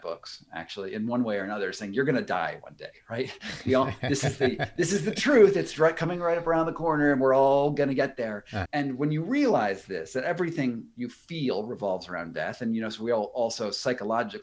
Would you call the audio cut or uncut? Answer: uncut